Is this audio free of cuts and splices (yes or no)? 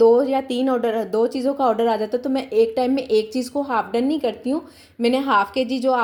yes